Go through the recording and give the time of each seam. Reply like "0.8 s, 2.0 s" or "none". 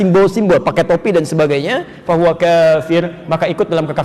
none

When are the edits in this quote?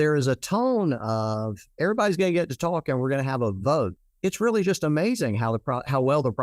3.9 s

